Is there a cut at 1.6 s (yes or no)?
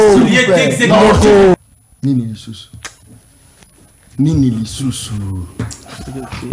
yes